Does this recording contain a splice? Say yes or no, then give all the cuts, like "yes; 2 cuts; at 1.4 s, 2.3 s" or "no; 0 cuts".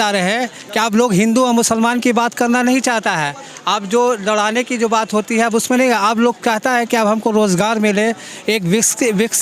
no; 0 cuts